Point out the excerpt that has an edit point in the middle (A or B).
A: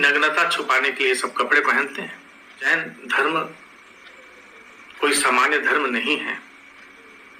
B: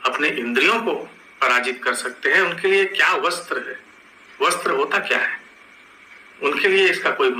A